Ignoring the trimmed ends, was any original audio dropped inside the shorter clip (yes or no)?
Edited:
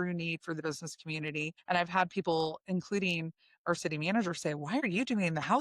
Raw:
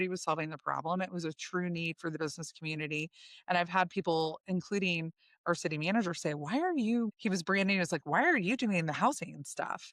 yes